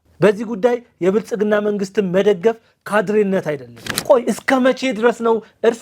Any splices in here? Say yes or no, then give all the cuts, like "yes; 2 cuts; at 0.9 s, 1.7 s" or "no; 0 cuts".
yes; 1 cut; at 3.9 s